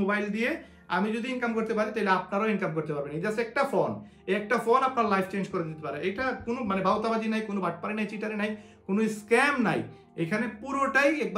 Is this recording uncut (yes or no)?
yes